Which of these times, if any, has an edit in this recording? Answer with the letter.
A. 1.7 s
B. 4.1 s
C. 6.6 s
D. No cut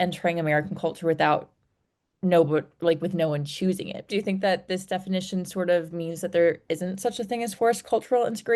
D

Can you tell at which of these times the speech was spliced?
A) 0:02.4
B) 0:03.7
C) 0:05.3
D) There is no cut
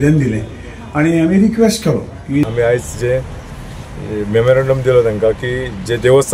A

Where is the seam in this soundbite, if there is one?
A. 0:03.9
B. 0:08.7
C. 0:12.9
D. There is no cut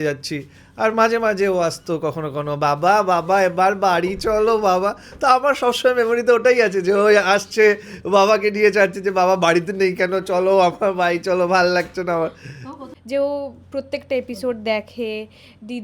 C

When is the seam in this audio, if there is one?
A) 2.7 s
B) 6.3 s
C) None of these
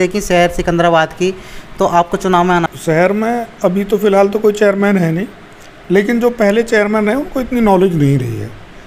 A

